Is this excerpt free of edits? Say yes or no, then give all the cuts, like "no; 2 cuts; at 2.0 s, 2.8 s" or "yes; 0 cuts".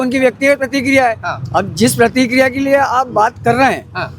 yes; 0 cuts